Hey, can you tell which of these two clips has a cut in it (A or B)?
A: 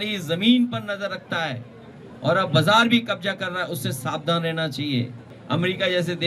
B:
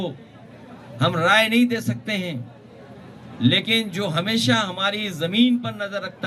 A